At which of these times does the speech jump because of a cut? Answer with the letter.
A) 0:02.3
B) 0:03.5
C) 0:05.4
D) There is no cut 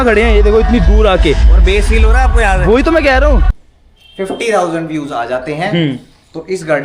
B